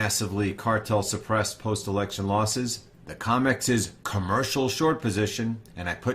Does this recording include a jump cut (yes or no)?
yes